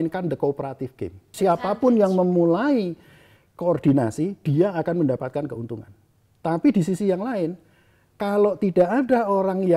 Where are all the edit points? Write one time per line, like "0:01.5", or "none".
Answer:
0:01.3